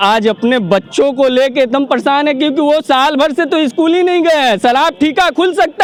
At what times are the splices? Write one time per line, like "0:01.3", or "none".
none